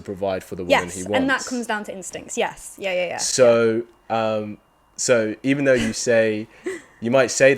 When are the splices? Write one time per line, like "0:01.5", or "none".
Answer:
none